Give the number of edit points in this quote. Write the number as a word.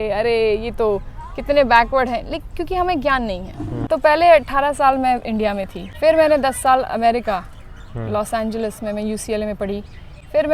two